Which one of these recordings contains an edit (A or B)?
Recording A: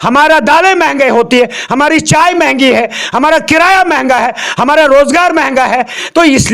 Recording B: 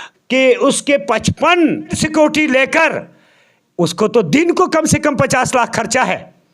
B